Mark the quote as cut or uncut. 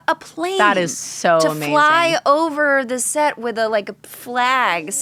uncut